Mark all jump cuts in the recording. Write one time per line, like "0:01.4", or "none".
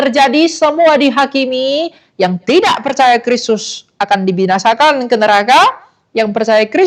none